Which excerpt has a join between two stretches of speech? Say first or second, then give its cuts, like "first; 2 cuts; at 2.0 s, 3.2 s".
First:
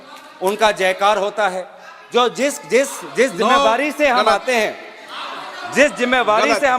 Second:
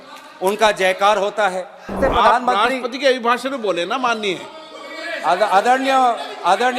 second; 1 cut; at 2.0 s